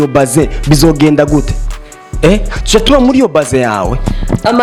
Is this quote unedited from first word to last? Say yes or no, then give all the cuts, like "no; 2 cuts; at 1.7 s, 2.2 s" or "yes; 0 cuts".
yes; 0 cuts